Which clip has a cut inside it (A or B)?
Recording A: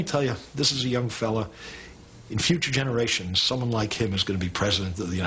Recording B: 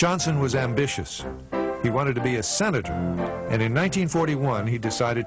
B